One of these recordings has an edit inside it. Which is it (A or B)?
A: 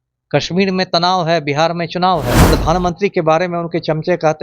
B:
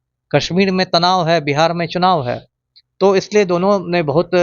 A